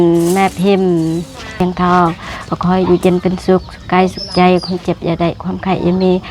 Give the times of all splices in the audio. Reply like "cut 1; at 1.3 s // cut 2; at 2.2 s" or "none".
cut 1; at 1.5 s